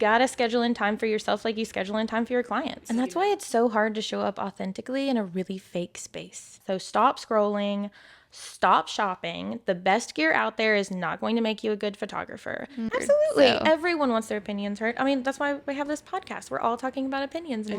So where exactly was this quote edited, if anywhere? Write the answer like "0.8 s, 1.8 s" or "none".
2.8 s, 6.6 s, 12.9 s